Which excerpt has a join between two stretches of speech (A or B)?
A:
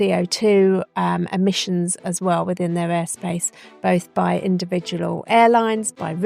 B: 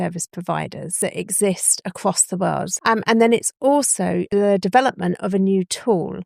B